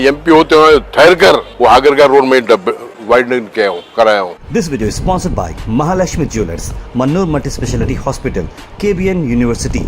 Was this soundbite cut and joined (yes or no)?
yes